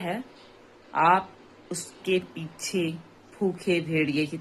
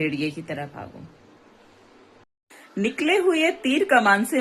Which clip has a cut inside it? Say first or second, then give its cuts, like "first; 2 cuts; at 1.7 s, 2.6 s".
second; 1 cut; at 2.4 s